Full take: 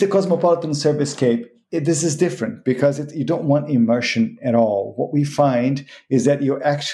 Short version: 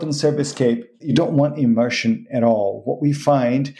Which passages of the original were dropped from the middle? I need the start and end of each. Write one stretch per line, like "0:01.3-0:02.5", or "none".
0:01.6-0:03.1